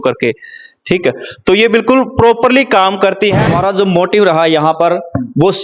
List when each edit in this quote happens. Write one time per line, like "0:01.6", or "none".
0:03.5